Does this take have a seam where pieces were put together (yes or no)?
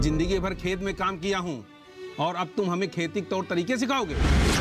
no